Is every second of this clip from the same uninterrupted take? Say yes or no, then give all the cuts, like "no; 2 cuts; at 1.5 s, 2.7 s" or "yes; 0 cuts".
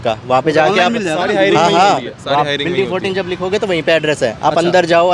yes; 0 cuts